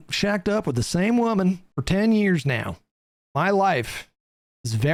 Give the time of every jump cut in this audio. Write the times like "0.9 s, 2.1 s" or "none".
none